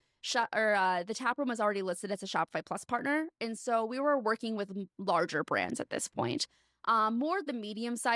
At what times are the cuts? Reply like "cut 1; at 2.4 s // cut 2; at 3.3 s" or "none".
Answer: none